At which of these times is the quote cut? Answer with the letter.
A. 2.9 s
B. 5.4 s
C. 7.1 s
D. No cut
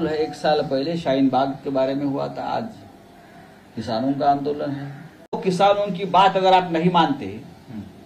B